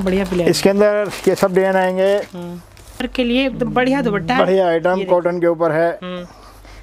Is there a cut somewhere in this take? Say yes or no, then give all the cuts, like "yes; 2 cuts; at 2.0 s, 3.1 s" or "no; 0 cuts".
yes; 1 cut; at 3.1 s